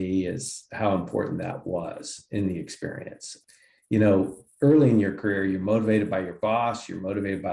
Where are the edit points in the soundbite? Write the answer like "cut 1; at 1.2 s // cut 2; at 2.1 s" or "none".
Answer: none